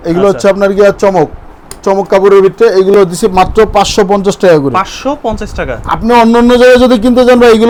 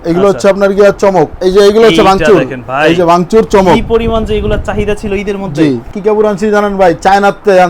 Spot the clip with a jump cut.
second; 2 cuts; at 1.3 s, 5.9 s

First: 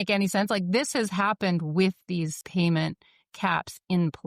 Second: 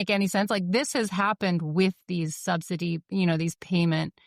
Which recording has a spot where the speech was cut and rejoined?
first; 1 cut; at 2.4 s

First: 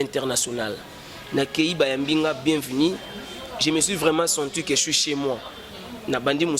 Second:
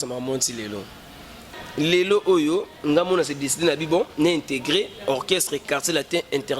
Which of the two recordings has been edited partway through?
second; 1 cut; at 1.5 s

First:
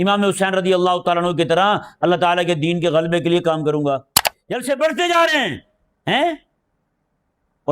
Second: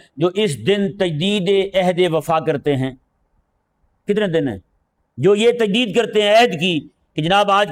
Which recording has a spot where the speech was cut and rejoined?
first; 1 cut; at 4.3 s

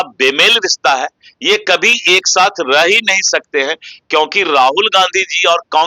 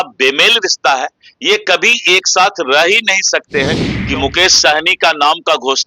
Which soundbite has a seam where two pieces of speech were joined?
second; 1 cut; at 3.9 s

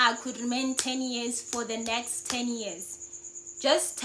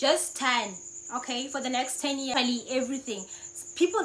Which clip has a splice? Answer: second; 1 cut; at 2.3 s

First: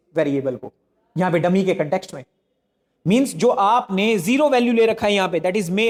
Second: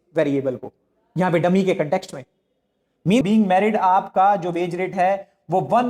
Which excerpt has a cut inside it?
second; 1 cut; at 3.2 s

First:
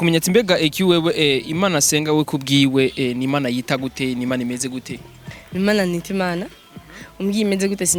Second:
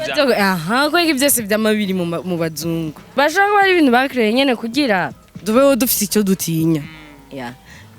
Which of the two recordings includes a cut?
second; 1 cut; at 3.0 s

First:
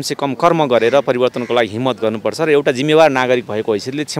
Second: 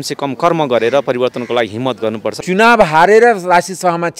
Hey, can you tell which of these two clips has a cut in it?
second; 1 cut; at 2.4 s

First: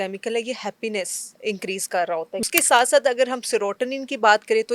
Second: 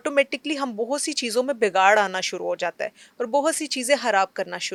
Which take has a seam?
first; 2 cuts; at 1.2 s, 2.5 s

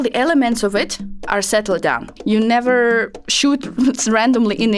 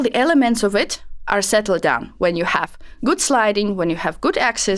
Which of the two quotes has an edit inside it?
first; 1 cut; at 2.1 s

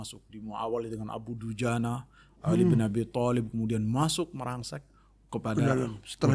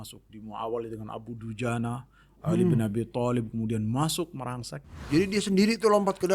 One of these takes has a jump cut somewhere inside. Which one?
second; 1 cut; at 5.1 s

